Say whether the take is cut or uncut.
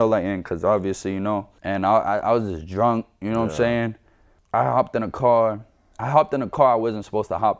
uncut